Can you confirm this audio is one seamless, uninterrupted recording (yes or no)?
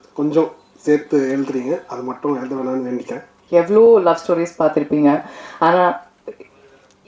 no